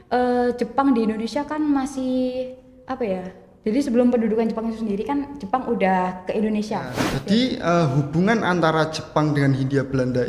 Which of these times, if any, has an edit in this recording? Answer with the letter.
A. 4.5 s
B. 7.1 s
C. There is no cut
B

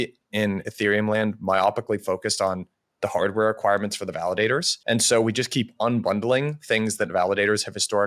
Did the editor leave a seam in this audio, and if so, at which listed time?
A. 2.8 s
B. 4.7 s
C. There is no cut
B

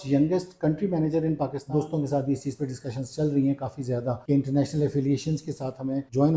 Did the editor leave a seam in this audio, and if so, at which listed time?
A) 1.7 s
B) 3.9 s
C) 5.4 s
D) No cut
A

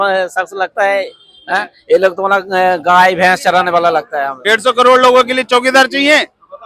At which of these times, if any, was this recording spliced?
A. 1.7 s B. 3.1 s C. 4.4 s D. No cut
C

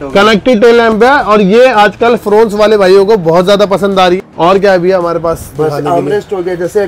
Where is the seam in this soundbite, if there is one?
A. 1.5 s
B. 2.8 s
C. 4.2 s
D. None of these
C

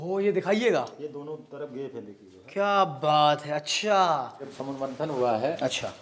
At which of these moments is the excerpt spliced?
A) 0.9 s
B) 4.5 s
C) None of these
B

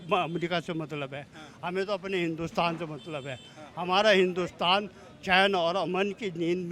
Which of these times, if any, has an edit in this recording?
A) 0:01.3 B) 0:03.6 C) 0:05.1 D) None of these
D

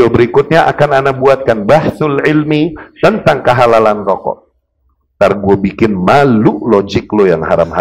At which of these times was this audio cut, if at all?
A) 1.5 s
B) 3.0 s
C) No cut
C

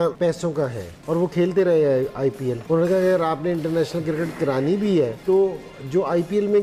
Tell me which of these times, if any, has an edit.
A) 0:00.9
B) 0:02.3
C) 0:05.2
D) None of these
D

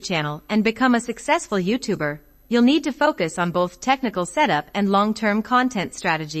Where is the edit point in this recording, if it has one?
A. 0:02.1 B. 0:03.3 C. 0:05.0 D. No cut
C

